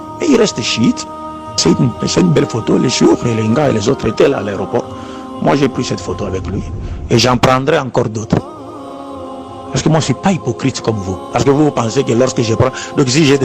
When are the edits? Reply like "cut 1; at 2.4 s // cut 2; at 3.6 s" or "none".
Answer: cut 1; at 1.6 s